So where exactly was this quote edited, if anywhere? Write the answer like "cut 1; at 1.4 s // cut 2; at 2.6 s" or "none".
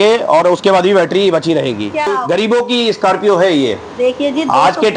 cut 1; at 2.1 s